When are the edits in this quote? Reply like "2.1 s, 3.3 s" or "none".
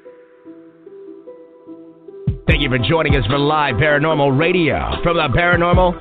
0.9 s